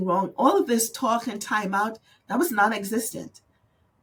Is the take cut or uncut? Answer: uncut